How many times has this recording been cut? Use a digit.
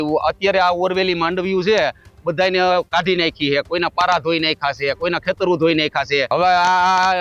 1